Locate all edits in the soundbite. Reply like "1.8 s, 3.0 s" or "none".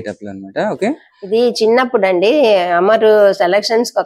1.1 s